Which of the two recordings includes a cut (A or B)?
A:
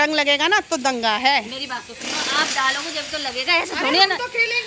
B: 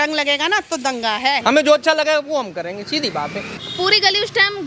B